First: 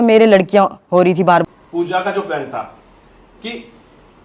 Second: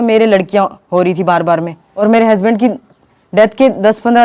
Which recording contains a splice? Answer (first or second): first